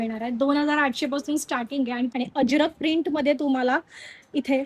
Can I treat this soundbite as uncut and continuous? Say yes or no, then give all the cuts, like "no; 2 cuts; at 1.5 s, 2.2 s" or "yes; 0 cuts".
no; 1 cut; at 2.1 s